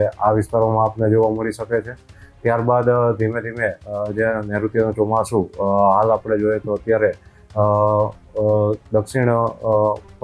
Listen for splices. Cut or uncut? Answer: uncut